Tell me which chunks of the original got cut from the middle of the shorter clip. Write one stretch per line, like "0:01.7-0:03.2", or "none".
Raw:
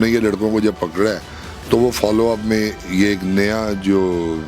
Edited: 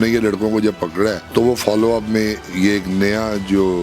0:01.2-0:01.6

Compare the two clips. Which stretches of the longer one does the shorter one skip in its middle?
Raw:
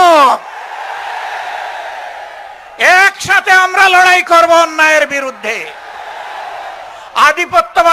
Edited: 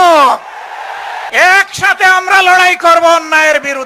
0:01.2-0:02.7

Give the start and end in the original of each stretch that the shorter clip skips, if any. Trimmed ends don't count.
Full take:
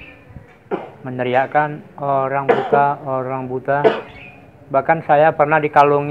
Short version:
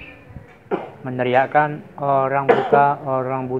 none

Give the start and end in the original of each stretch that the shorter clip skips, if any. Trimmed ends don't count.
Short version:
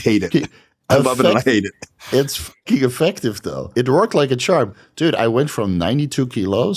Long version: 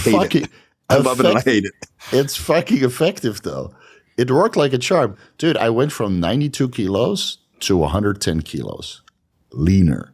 0:03.5-0:03.9

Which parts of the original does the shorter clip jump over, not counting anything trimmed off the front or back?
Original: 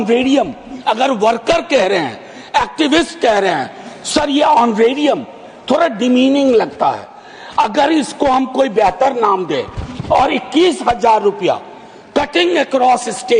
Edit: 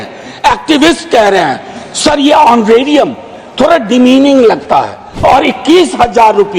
0:07.1-0:09.9

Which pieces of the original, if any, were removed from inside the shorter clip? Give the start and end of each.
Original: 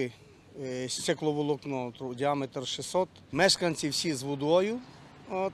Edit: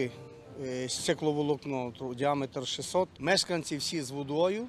0:03.1-0:03.3

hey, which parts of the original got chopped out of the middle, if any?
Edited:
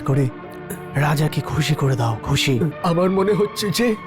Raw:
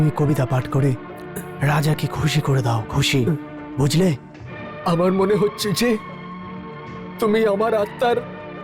0:03.4-0:04.8

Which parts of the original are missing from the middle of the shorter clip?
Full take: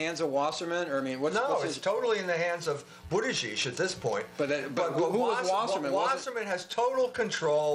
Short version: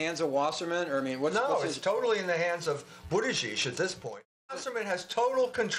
0:04.5-0:06.1

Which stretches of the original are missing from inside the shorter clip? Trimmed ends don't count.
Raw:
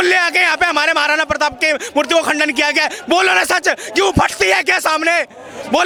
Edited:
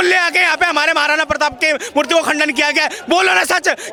none

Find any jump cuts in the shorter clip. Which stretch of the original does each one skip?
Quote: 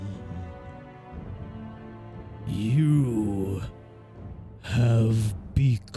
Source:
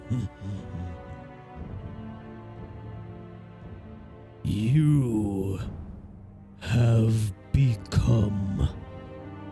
0:02.9-0:04.4

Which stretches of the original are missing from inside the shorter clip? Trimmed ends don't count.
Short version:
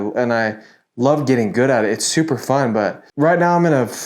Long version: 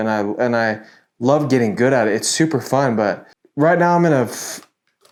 0:03.3-0:03.4

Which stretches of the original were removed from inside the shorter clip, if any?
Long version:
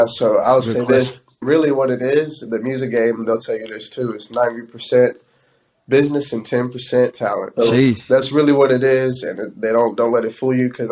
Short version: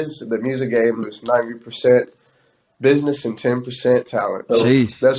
0:03.2-0:04.1

